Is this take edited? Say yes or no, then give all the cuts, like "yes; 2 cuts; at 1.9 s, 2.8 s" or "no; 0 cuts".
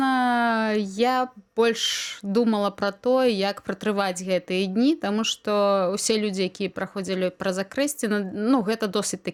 no; 0 cuts